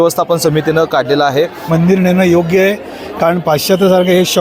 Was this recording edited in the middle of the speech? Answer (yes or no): yes